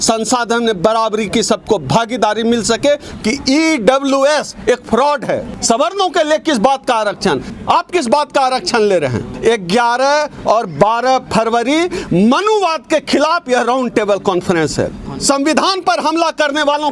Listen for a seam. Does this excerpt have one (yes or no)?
yes